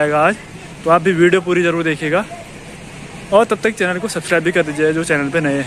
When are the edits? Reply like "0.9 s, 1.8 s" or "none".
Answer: none